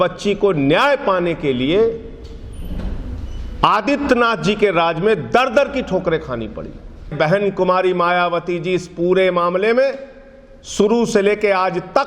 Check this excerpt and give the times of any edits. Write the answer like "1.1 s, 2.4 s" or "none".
7.1 s